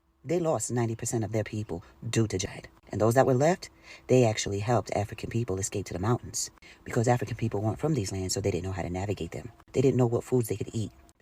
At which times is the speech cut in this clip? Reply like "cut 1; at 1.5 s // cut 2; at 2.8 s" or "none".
cut 1; at 2.5 s